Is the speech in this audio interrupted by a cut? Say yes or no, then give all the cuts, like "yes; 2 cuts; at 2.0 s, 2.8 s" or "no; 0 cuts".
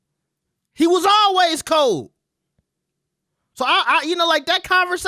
no; 0 cuts